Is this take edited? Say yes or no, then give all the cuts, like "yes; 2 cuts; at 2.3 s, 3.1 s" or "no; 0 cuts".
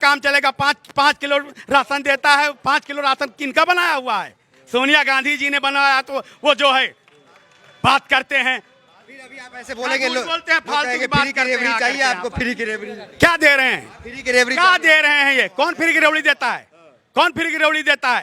no; 0 cuts